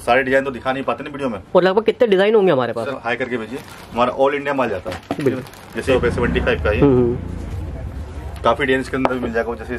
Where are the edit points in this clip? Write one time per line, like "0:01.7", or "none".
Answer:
0:03.0
0:05.8